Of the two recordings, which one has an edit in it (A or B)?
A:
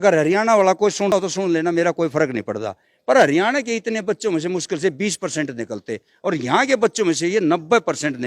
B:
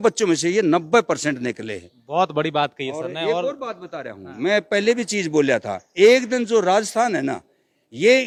A